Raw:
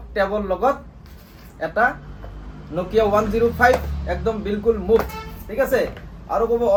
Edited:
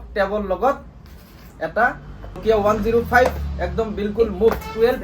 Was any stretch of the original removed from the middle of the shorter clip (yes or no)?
yes